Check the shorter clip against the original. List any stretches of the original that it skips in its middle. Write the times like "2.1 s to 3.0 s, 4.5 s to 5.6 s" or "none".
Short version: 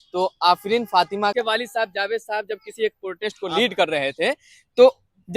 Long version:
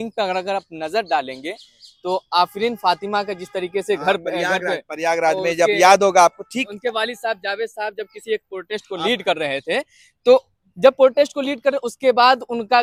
3.2 s to 6.8 s